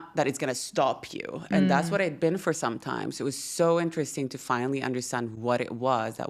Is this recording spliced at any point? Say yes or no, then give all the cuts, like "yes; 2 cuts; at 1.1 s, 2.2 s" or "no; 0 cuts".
no; 0 cuts